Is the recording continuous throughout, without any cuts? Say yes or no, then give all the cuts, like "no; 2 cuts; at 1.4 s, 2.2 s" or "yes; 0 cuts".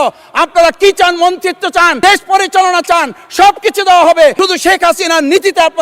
no; 2 cuts; at 1.9 s, 4.4 s